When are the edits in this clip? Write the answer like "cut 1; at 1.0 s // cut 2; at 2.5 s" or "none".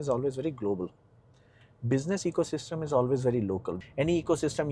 cut 1; at 3.7 s